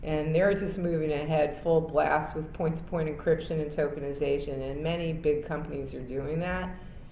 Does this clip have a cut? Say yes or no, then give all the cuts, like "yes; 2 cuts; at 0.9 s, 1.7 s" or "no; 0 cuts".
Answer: yes; 1 cut; at 4.7 s